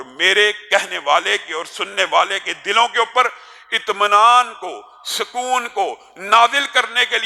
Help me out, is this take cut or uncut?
uncut